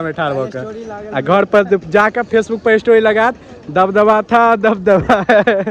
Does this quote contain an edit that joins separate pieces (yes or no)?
no